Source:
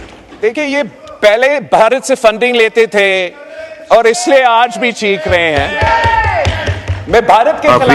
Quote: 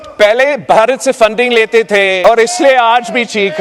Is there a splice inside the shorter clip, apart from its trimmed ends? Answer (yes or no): yes